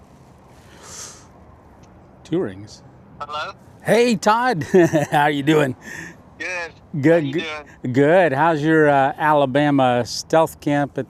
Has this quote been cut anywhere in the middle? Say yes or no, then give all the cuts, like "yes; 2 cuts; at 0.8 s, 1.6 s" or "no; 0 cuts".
no; 0 cuts